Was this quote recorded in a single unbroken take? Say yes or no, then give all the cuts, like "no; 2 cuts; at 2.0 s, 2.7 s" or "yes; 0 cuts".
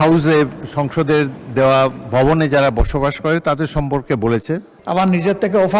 no; 1 cut; at 4.7 s